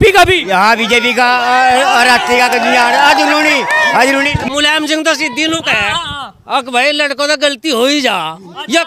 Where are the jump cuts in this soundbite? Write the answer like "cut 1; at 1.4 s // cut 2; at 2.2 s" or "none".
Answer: cut 1; at 4.4 s